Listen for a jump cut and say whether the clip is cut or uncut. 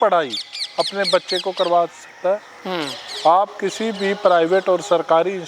uncut